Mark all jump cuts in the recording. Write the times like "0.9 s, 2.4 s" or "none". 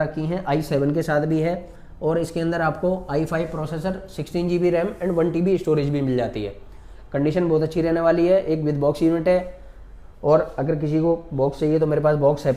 none